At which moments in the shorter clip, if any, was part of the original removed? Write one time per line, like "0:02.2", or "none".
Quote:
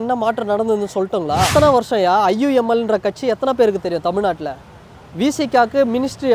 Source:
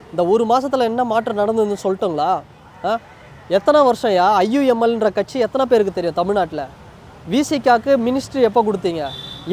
0:01.5